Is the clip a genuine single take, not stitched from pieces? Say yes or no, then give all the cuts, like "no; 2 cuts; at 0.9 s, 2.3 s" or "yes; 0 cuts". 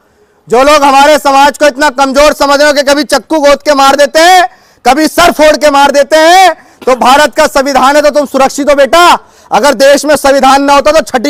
yes; 0 cuts